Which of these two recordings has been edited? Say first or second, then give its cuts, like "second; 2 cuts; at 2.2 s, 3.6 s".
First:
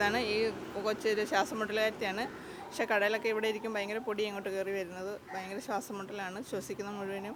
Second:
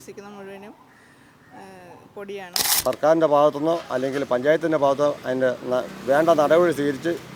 second; 1 cut; at 2.7 s